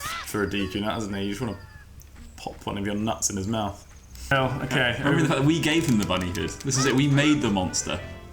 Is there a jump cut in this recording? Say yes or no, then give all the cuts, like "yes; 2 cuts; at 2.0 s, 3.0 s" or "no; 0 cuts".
yes; 1 cut; at 4.3 s